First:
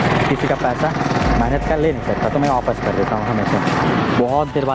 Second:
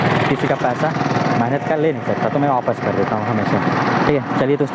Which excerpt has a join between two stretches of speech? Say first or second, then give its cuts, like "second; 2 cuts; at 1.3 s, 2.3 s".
first; 1 cut; at 3.8 s